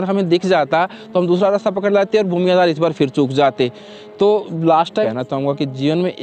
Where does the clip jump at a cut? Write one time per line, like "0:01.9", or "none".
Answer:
0:05.1